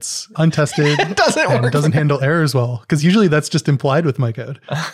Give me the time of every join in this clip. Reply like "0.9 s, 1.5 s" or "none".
none